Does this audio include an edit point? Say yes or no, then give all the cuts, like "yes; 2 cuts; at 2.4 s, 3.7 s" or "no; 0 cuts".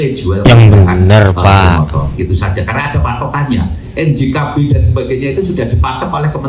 no; 0 cuts